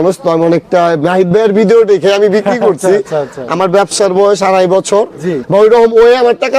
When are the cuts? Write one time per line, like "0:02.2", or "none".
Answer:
none